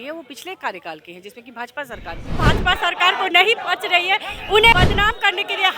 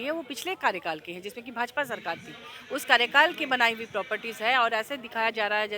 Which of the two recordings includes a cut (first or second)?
first